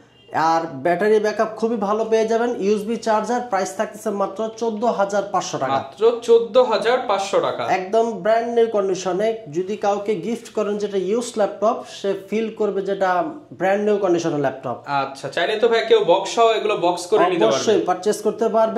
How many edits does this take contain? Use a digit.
0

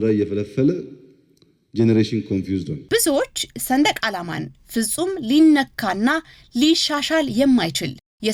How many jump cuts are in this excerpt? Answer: 0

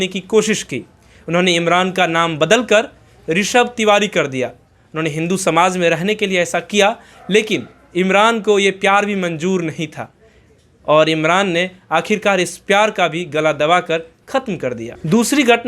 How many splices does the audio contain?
0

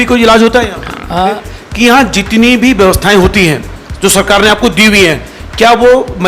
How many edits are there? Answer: 1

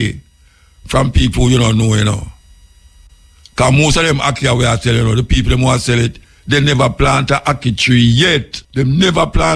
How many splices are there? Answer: 1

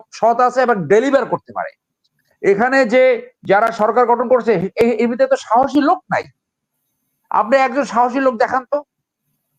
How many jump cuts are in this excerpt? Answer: 0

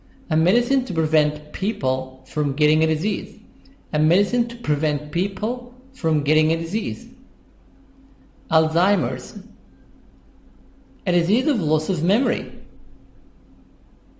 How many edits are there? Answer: 1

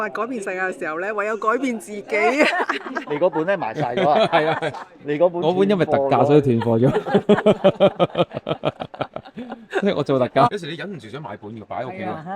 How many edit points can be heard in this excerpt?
2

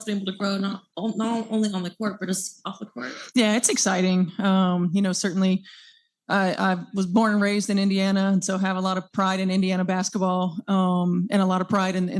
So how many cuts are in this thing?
1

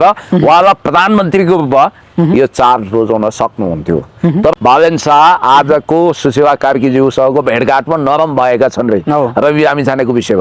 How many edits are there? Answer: 1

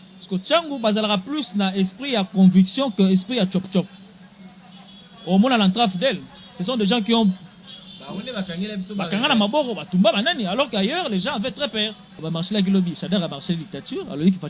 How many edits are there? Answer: 1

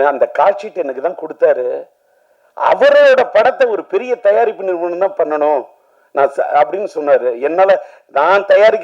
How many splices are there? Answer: 0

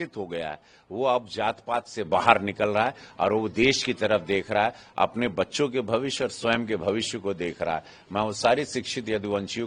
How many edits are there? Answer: 0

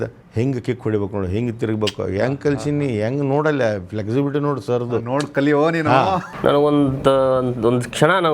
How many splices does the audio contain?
1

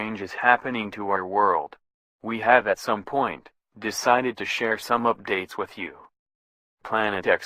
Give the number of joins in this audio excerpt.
1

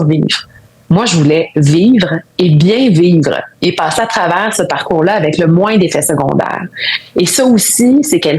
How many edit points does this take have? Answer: 0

